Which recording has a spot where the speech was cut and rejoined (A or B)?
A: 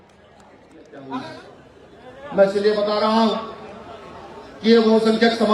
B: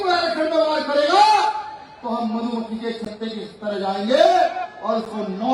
A